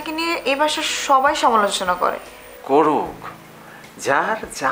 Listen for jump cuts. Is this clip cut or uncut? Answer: uncut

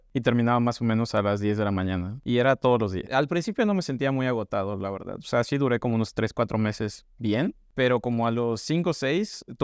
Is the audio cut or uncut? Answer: cut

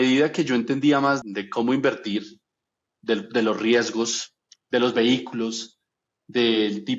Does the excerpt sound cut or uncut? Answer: cut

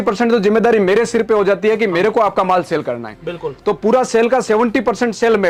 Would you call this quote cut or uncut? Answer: uncut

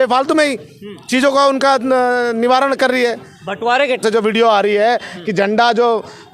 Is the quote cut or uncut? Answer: cut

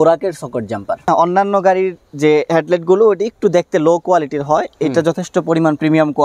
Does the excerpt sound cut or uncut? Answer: cut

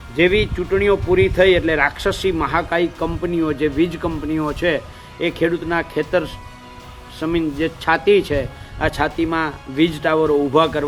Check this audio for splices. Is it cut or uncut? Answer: uncut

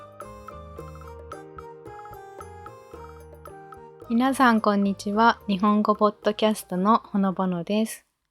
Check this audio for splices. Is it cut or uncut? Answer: cut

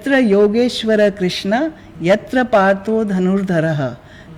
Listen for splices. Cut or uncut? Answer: uncut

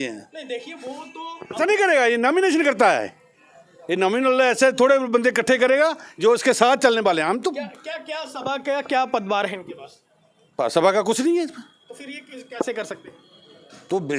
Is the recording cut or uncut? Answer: cut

